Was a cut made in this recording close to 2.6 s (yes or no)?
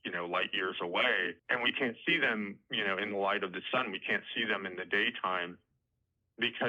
yes